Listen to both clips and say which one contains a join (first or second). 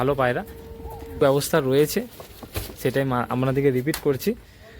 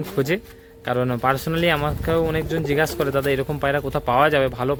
first